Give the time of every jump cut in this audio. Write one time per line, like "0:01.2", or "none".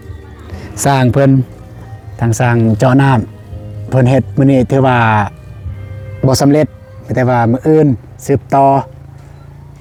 none